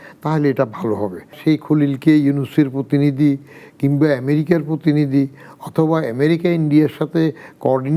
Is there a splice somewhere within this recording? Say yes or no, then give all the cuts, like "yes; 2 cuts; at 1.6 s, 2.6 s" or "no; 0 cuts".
yes; 1 cut; at 1.4 s